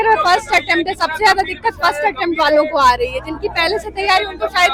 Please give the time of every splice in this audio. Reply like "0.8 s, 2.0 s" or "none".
none